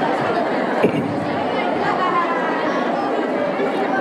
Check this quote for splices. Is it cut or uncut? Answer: uncut